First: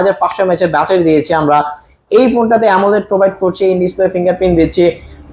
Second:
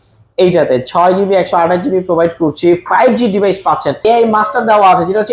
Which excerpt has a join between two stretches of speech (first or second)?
second